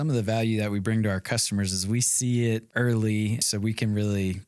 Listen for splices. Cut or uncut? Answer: cut